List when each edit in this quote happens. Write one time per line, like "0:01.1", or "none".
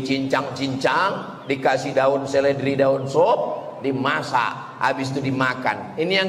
none